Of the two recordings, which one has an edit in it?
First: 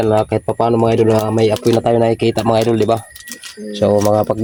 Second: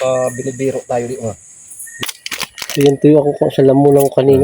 second; 1 cut; at 2.0 s

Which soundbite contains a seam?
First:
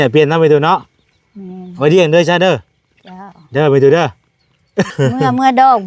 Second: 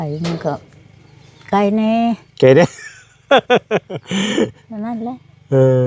first; 1 cut; at 4.9 s

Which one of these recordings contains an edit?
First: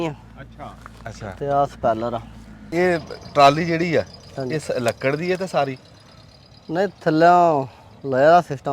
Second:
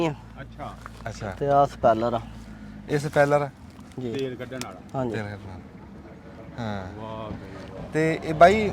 first; 1 cut; at 2.5 s

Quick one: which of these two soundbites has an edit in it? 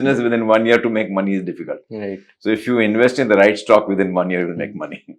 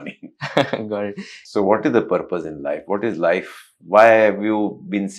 second; 1 cut; at 1.4 s

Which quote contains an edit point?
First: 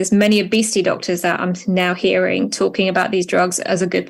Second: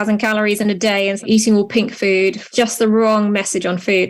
second; 2 cuts; at 1.2 s, 2.5 s

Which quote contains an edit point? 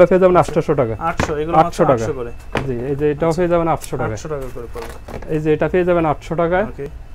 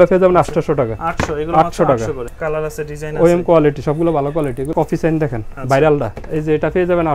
second; 3 cuts; at 2.3 s, 4.7 s, 6.2 s

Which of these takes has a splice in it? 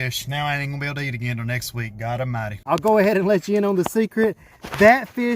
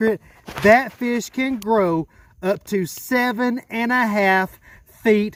first; 1 cut; at 2.5 s

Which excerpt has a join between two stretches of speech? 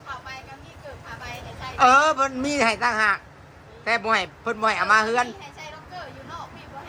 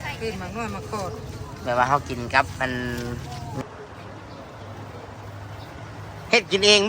second; 1 cut; at 3.6 s

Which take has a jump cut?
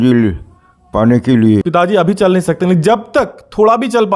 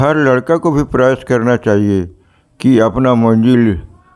first; 1 cut; at 1.7 s

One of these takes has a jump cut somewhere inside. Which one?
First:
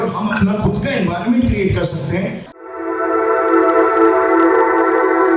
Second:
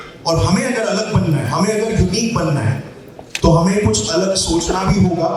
first; 1 cut; at 2.5 s

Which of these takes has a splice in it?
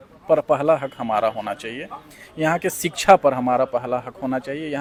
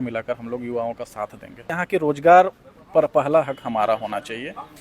second; 1 cut; at 1.7 s

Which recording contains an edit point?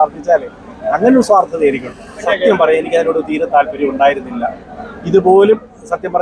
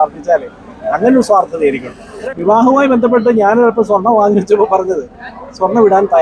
second; 1 cut; at 2.3 s

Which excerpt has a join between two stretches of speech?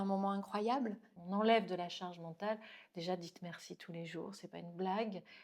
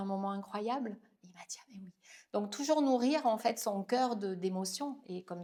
first; 1 cut; at 1.1 s

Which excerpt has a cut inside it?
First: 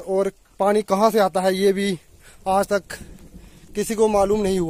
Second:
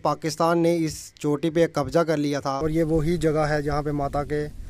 second; 1 cut; at 2.5 s

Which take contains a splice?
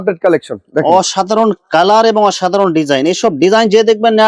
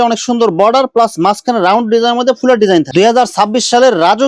second; 1 cut; at 2.9 s

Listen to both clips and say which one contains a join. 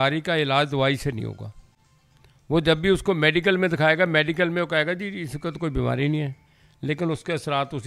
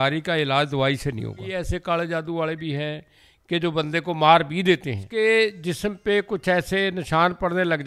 second; 2 cuts; at 1.5 s, 5.1 s

